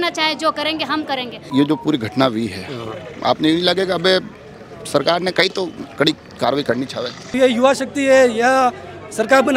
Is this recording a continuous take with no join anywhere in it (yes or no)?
no